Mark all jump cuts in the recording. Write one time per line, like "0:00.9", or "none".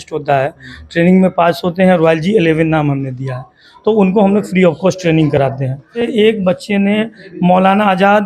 0:06.0